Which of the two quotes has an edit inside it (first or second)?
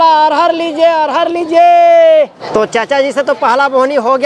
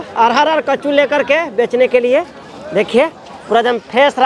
first